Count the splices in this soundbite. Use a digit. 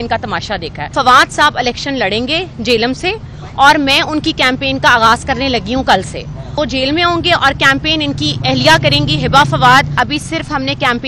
3